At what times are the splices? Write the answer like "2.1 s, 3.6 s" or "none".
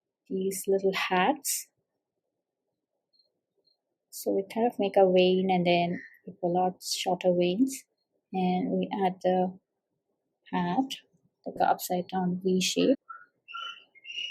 12.9 s

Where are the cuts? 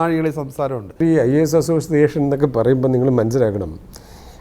1.0 s

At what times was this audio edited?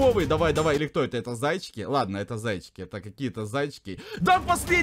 none

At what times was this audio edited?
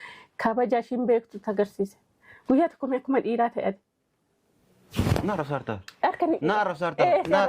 2.2 s

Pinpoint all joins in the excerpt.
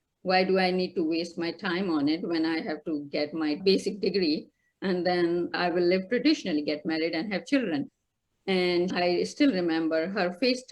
7.9 s, 8.9 s

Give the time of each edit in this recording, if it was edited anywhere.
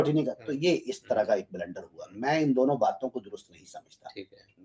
none

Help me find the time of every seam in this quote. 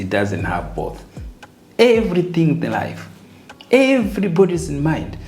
none

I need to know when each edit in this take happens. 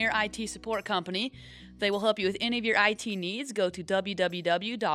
none

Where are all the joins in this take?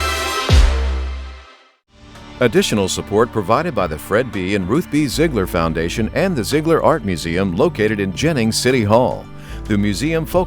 2.3 s

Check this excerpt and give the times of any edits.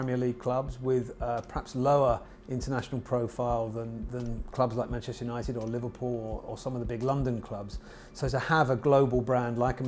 none

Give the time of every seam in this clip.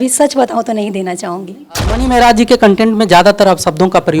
1.8 s

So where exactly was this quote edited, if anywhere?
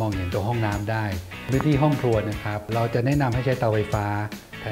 1.5 s, 2.6 s

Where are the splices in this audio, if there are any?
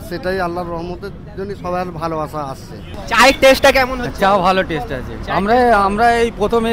2.9 s

